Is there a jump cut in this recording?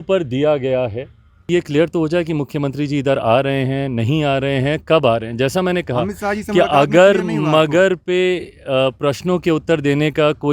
yes; 1 cut; at 1.5 s

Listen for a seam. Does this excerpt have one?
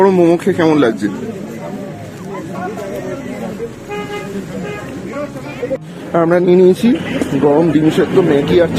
no; 0 cuts

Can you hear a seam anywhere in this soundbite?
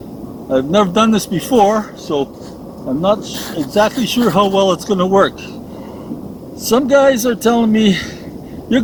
no; 0 cuts

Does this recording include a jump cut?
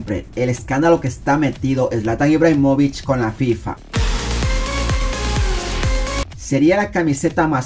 yes; 2 cuts; at 3.9 s, 6.3 s

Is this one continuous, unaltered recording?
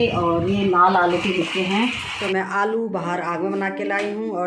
no; 1 cut; at 2.1 s

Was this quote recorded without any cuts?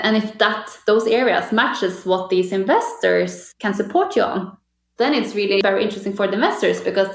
no; 2 cuts; at 3.5 s, 5.6 s

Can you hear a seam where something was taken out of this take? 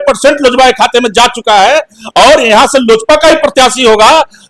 no; 0 cuts

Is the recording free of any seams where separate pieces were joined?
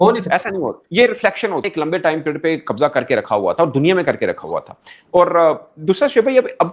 no; 1 cut; at 1.7 s

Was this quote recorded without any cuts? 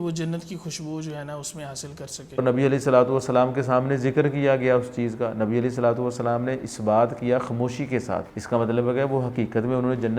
no; 2 cuts; at 2.4 s, 8.3 s

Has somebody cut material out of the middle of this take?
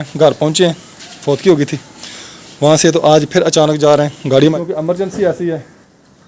yes; 1 cut; at 4.5 s

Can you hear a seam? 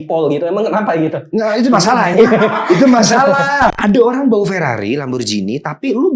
yes; 1 cut; at 3.7 s

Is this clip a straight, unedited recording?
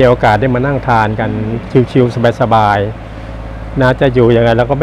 yes; 0 cuts

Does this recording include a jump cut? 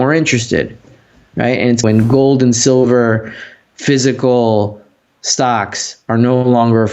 yes; 1 cut; at 1.8 s

